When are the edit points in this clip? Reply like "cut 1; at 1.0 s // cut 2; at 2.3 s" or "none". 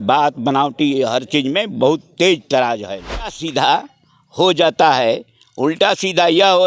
cut 1; at 3.4 s